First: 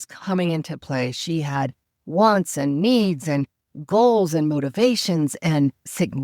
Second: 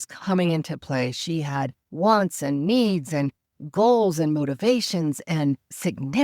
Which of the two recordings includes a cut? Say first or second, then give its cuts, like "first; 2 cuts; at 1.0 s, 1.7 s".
second; 1 cut; at 1.8 s